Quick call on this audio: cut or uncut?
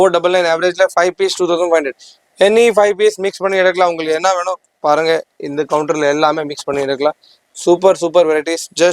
uncut